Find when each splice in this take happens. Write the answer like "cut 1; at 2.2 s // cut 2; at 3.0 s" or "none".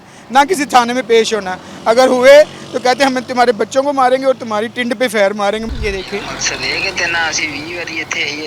cut 1; at 5.7 s